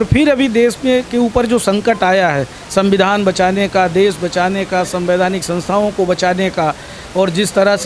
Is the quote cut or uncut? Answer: uncut